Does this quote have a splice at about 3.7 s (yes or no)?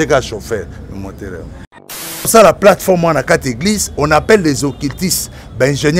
no